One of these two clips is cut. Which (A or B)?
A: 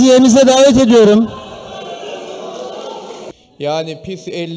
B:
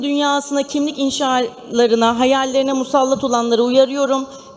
A